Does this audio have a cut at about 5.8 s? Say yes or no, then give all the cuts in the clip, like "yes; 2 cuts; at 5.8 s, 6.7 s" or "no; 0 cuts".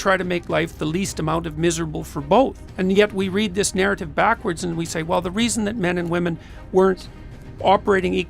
no; 1 cut; at 2.6 s